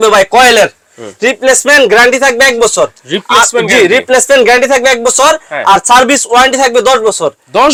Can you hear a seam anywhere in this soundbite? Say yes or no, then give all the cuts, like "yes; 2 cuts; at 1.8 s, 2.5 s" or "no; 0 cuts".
no; 0 cuts